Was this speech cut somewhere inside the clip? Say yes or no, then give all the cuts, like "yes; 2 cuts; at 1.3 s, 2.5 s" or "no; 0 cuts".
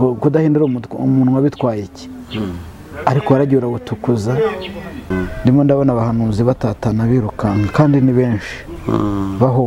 yes; 1 cut; at 5.1 s